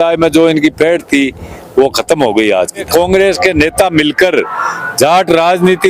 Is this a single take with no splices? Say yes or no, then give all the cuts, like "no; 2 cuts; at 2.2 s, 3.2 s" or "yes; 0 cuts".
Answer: no; 1 cut; at 2.9 s